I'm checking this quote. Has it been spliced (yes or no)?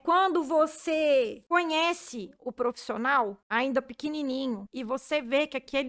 yes